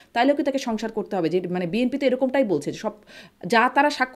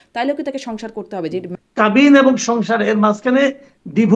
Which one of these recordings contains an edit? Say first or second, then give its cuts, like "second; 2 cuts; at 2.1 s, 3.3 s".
second; 1 cut; at 1.6 s